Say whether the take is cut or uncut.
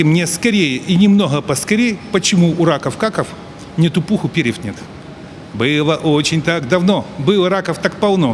uncut